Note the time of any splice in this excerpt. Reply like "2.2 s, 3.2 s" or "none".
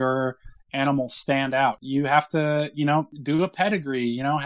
1.8 s, 3.1 s